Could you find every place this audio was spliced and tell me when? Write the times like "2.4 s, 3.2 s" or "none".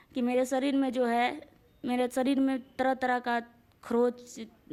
none